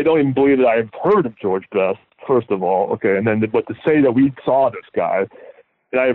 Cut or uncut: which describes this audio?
uncut